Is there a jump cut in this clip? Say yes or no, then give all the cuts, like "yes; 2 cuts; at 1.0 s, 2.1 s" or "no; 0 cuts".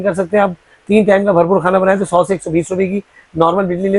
no; 0 cuts